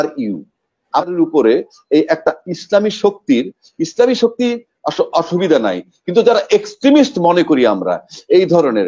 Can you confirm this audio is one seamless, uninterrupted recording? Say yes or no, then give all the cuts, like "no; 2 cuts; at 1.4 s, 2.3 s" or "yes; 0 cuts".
no; 1 cut; at 1.1 s